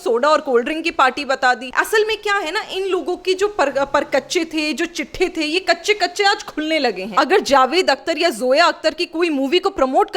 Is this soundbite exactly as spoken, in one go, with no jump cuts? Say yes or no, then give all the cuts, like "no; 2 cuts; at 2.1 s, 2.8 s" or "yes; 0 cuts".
no; 1 cut; at 7.0 s